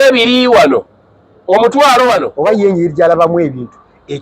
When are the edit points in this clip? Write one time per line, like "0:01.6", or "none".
0:02.3